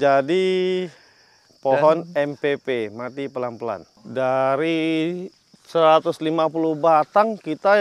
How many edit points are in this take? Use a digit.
1